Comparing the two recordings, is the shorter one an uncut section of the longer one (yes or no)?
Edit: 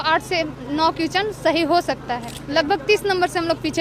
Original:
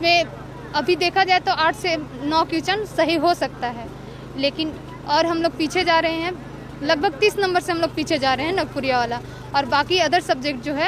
no